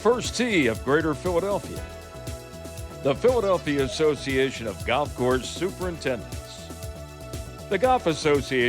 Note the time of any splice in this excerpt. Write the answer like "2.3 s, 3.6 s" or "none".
none